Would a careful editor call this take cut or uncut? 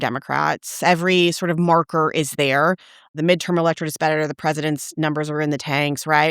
cut